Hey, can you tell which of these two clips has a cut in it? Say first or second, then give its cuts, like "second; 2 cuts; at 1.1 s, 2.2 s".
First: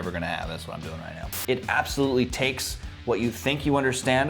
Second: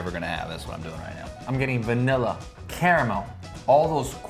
first; 1 cut; at 1.3 s